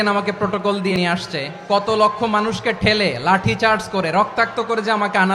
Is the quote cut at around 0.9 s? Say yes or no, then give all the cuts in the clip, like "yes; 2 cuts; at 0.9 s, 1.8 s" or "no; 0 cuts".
yes; 1 cut; at 0.9 s